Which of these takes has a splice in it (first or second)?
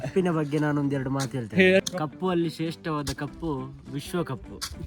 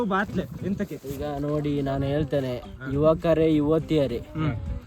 first